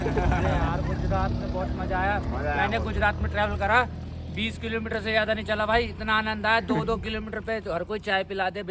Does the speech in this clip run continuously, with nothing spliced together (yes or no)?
yes